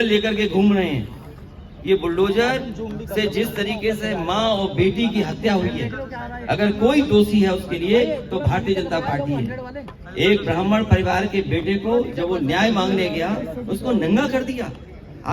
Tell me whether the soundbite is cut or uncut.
uncut